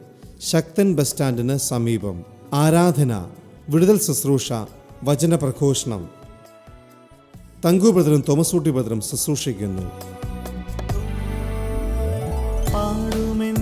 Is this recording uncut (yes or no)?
no